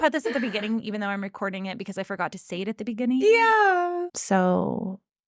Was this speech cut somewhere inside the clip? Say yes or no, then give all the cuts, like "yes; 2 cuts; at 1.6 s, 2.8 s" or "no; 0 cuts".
yes; 1 cut; at 4.1 s